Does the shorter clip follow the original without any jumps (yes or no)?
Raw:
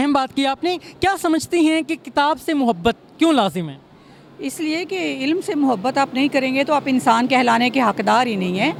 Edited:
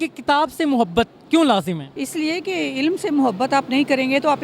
no